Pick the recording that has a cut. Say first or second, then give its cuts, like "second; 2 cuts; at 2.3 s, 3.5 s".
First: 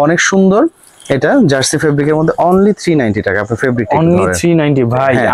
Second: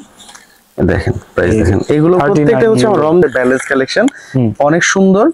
second; 1 cut; at 3.2 s